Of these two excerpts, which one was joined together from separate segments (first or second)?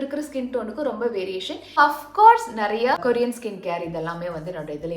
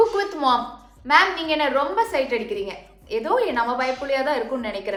first